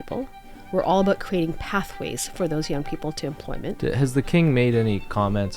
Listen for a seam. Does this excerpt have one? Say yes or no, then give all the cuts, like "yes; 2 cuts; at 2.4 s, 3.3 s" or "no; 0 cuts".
yes; 1 cut; at 3.8 s